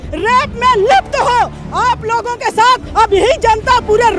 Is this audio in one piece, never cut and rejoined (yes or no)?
yes